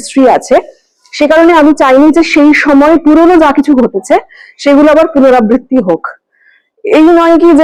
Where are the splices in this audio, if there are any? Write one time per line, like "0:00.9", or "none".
none